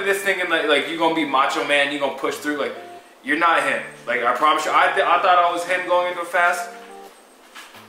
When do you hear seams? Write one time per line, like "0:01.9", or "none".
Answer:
none